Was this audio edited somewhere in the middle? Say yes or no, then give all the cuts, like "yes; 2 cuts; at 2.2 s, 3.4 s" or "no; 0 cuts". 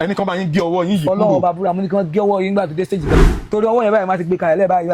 yes; 1 cut; at 3.1 s